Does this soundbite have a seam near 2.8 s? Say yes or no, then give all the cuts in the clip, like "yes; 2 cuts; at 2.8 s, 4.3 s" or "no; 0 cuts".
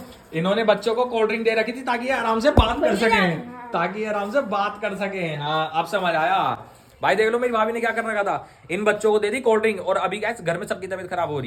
no; 0 cuts